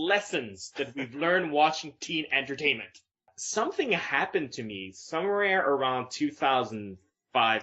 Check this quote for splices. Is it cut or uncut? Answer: cut